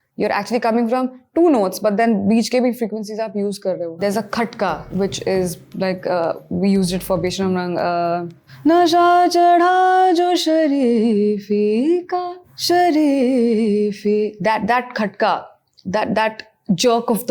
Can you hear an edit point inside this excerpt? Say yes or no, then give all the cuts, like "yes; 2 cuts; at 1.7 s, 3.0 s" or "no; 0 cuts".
yes; 1 cut; at 3.9 s